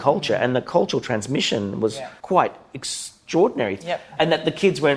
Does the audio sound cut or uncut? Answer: cut